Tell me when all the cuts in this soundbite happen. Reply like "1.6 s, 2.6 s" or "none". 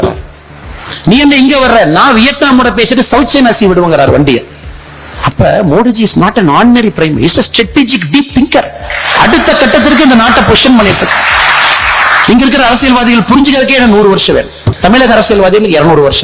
14.6 s